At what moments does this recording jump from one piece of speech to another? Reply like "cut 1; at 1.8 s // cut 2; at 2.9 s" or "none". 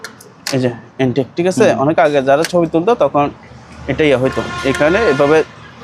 none